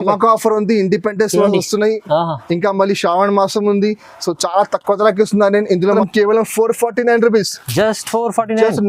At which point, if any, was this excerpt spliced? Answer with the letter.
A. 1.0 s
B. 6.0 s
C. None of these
B